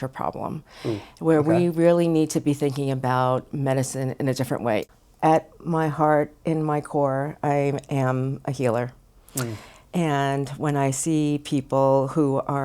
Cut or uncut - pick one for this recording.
cut